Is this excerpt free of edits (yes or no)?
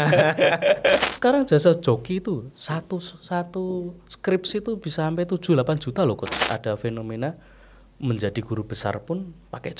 no